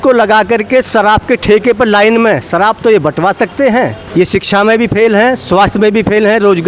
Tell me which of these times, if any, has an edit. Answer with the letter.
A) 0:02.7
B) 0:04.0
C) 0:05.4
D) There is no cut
B